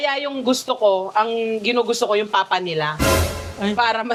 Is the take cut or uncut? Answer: uncut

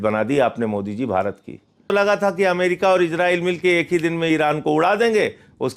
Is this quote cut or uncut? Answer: cut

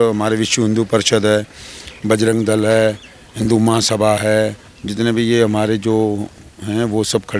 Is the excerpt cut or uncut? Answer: uncut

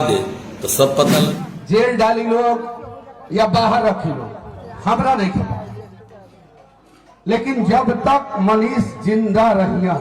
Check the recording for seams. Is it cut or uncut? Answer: cut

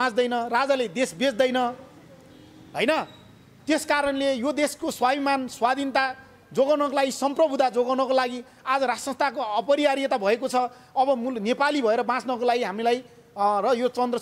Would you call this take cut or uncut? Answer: uncut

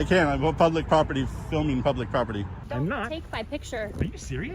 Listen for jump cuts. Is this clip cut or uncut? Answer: cut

